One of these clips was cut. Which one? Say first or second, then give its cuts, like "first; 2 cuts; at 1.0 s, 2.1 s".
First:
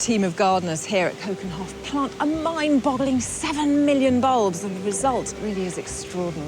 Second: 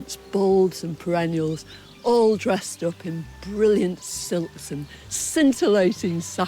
first; 1 cut; at 5.3 s